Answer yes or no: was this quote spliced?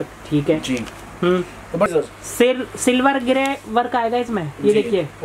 yes